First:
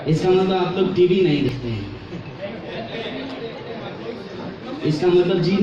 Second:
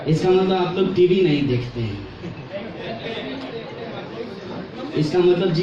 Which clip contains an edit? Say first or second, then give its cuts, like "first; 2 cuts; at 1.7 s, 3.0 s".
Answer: first; 1 cut; at 1.5 s